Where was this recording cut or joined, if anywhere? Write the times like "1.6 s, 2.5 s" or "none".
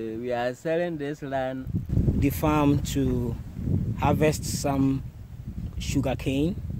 1.8 s

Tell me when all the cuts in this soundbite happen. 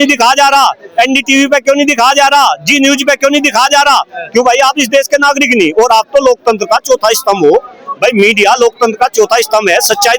none

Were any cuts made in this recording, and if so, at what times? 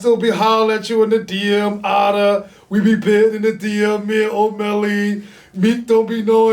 none

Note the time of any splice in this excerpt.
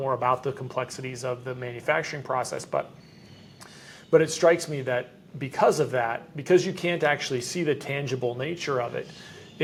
none

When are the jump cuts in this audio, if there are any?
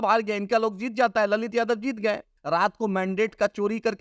2.3 s

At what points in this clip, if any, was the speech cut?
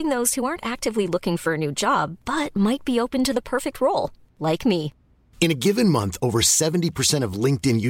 none

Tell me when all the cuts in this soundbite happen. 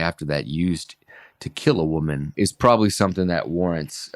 2.3 s

